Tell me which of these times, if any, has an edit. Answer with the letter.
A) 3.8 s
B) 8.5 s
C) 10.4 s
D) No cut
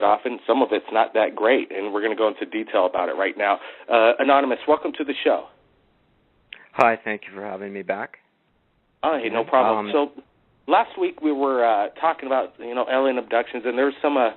C